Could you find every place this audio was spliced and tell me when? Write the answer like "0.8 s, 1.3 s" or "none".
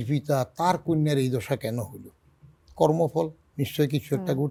none